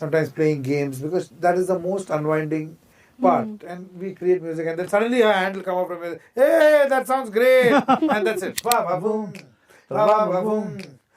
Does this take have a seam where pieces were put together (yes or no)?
yes